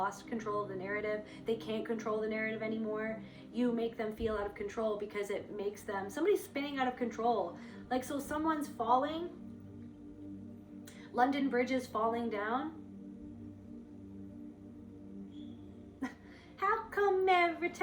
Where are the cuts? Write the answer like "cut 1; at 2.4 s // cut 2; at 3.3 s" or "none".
cut 1; at 12.8 s // cut 2; at 16.0 s